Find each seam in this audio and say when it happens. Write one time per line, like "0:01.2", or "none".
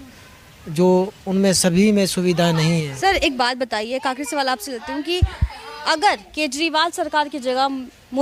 none